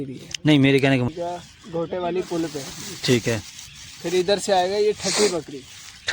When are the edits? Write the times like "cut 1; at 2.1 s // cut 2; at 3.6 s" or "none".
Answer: cut 1; at 1.1 s